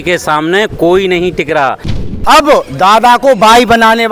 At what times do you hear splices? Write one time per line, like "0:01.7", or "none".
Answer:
0:01.9